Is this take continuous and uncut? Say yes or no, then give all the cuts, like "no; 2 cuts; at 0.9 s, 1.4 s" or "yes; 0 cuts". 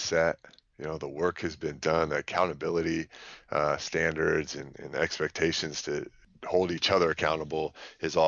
no; 1 cut; at 6.2 s